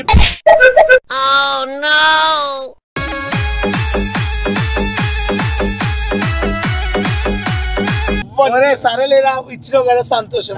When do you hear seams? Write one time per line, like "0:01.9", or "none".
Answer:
0:08.2